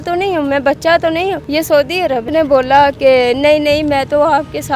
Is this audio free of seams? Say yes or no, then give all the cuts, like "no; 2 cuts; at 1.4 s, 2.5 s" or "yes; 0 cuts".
no; 2 cuts; at 1.4 s, 2.2 s